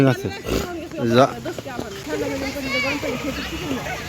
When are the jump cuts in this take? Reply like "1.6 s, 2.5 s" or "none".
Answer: 2.1 s